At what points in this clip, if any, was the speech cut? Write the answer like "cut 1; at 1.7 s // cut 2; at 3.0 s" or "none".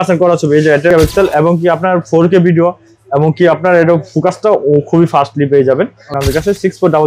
cut 1; at 1.0 s // cut 2; at 6.2 s

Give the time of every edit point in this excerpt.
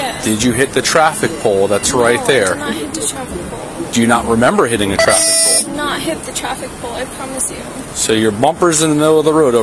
none

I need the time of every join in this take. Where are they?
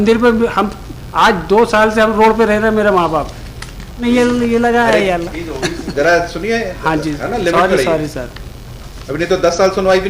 cut 1; at 4.0 s

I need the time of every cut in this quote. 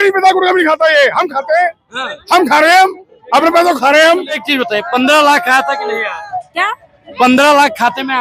cut 1; at 4.5 s

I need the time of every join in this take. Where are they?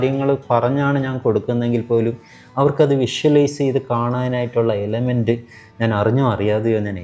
none

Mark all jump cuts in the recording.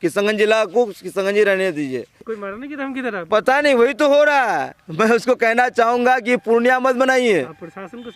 cut 1; at 2.2 s

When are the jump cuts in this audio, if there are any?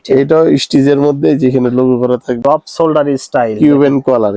cut 1; at 2.4 s

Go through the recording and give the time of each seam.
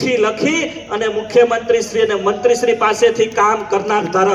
none

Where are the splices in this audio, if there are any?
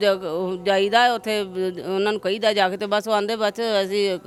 none

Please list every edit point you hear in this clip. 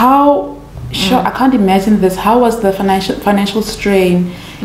none

